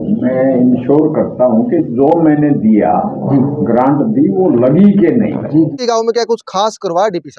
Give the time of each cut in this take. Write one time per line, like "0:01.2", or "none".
0:05.8